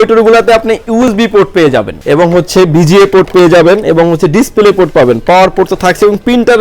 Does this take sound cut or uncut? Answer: cut